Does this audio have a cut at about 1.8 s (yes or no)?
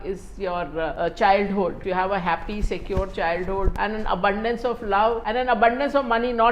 yes